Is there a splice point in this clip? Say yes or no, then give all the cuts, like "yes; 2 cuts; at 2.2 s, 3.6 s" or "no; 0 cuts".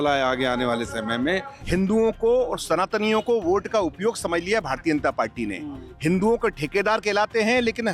yes; 1 cut; at 1.5 s